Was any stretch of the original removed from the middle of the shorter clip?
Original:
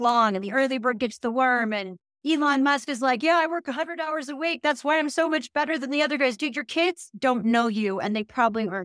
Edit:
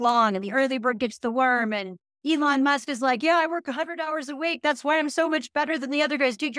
no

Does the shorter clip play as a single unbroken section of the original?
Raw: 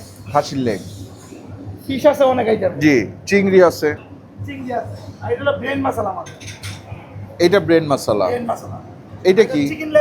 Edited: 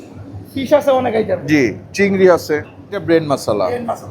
no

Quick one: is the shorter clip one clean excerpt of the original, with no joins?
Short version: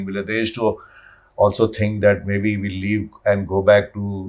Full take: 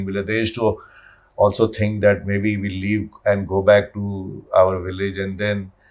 yes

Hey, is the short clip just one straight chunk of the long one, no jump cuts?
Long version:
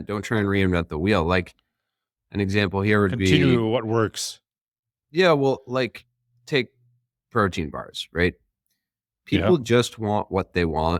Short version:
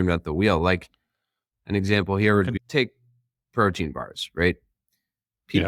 no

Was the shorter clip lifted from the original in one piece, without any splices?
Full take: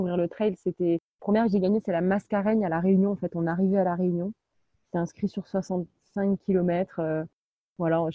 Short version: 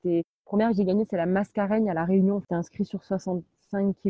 no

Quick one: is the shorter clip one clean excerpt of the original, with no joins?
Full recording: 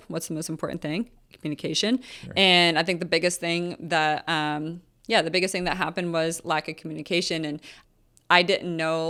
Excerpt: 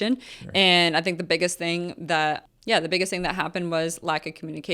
no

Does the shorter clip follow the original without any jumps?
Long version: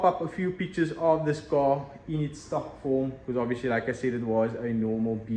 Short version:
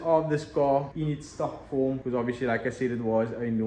no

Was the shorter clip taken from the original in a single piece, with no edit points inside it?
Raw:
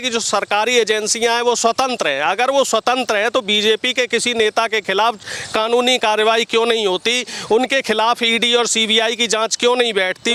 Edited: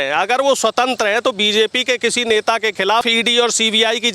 no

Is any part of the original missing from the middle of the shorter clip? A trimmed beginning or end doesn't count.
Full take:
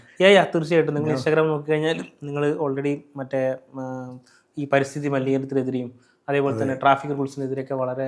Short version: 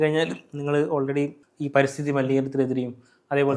yes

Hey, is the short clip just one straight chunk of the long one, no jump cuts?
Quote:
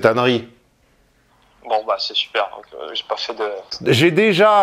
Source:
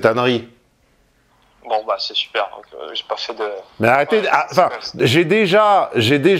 no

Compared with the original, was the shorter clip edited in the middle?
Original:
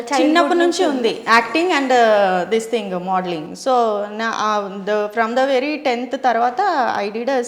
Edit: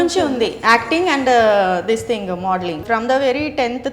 yes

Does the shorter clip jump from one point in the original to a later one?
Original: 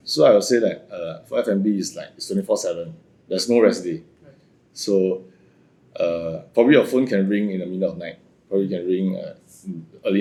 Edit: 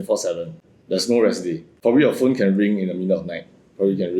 yes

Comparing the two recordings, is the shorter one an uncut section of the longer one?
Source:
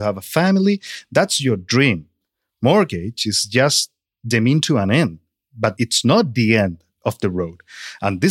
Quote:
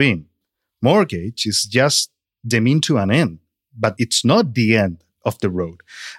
yes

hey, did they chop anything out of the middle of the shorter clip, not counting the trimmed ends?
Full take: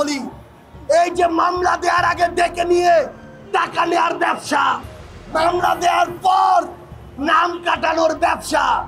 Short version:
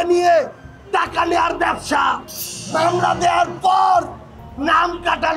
no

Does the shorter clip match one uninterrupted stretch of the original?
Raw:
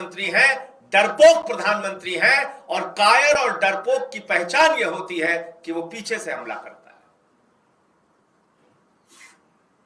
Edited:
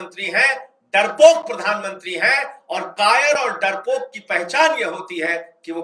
yes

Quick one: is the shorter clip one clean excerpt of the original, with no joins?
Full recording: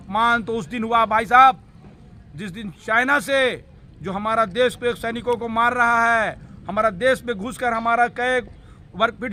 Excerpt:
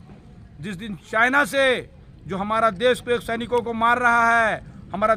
yes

